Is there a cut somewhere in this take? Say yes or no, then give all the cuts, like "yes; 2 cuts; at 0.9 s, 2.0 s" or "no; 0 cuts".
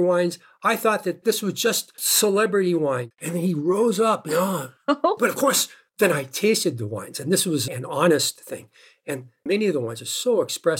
yes; 2 cuts; at 1.2 s, 3.1 s